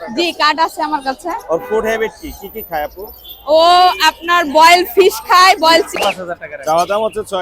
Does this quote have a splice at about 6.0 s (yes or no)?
yes